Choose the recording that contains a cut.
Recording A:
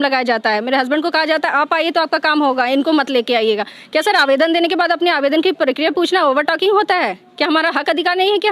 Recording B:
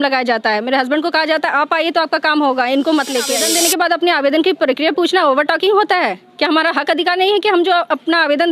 B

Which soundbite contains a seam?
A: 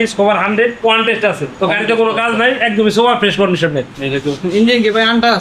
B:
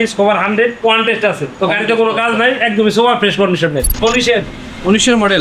B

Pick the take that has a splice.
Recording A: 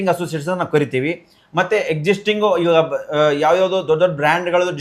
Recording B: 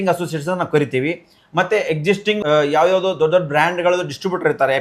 B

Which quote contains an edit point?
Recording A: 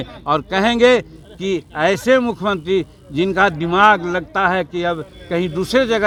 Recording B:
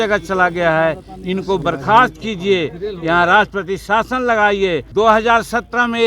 B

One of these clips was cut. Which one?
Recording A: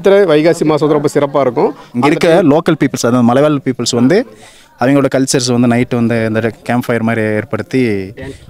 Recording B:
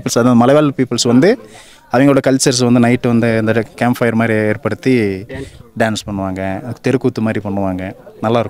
A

